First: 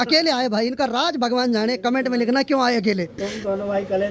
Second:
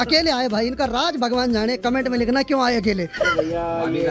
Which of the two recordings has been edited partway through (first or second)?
first